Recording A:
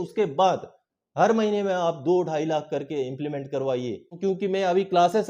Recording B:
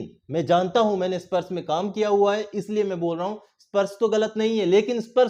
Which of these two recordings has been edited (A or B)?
A